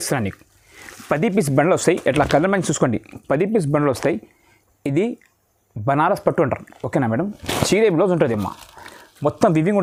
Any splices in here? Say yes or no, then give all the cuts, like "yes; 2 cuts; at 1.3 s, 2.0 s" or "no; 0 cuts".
no; 0 cuts